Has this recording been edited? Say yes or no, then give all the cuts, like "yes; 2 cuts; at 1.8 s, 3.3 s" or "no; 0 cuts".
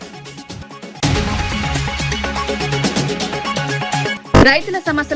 yes; 2 cuts; at 1.0 s, 4.2 s